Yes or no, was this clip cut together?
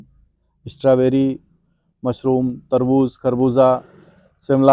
no